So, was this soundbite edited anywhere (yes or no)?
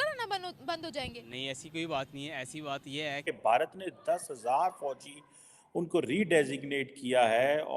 yes